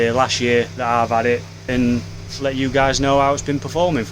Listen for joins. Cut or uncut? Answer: cut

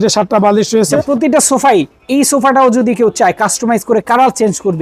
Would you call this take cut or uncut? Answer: cut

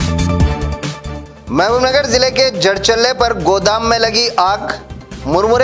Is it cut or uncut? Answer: cut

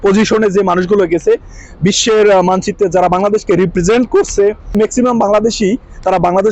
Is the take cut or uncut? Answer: cut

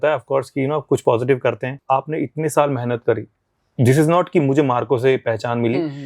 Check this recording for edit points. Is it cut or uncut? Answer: cut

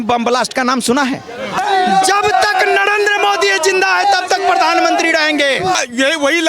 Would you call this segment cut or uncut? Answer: cut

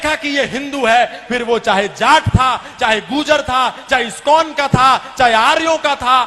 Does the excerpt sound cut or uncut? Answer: uncut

